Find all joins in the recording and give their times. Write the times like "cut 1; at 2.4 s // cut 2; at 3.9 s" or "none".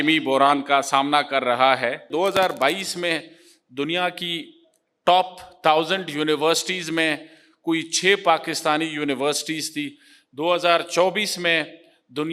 cut 1; at 2.1 s